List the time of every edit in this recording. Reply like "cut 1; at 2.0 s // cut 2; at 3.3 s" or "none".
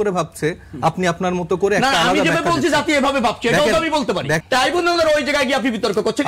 cut 1; at 4.4 s